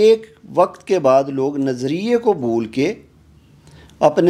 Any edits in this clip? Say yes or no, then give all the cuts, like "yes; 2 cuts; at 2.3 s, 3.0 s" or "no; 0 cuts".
no; 0 cuts